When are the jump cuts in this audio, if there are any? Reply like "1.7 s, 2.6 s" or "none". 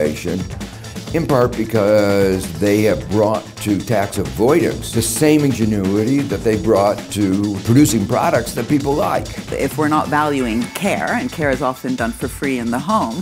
4.8 s, 7.6 s, 9.6 s